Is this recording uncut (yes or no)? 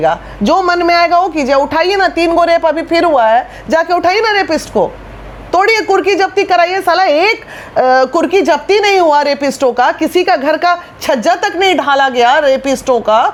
yes